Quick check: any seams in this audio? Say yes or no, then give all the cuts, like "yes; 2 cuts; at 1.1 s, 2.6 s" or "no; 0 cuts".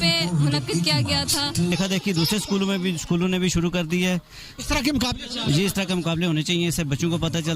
yes; 1 cut; at 1.7 s